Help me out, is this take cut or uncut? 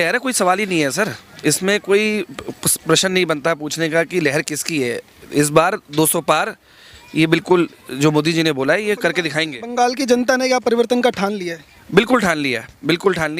uncut